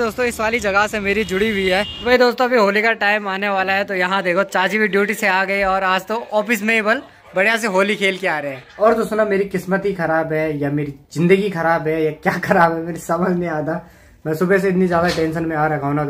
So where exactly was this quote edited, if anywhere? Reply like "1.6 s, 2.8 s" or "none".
2.0 s, 8.6 s